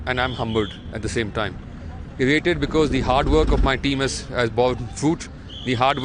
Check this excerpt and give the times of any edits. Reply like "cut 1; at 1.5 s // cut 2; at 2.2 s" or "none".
none